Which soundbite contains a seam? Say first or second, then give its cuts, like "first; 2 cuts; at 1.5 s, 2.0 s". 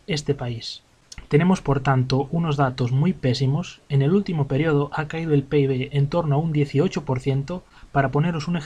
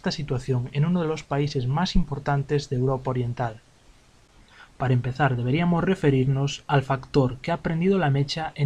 second; 1 cut; at 1.4 s